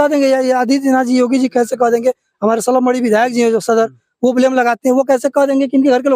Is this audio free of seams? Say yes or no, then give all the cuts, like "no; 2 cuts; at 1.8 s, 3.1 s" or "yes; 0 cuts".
yes; 0 cuts